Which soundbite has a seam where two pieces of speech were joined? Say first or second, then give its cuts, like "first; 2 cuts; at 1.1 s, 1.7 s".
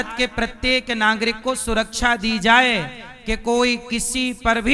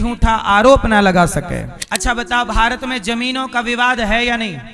second; 1 cut; at 1.8 s